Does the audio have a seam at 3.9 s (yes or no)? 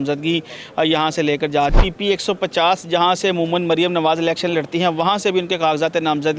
no